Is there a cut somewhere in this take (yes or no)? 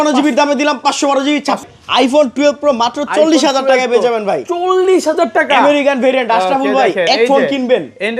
yes